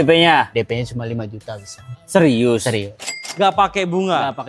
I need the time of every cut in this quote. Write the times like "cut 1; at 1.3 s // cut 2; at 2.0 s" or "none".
cut 1; at 2.9 s